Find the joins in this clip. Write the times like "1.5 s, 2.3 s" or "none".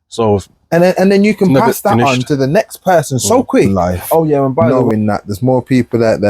4.6 s